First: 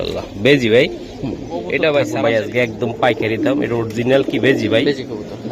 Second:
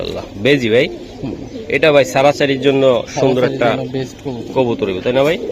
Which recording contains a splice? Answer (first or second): first